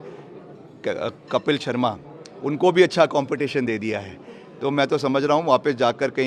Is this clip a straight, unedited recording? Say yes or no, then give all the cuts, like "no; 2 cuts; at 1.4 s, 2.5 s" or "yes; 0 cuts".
yes; 0 cuts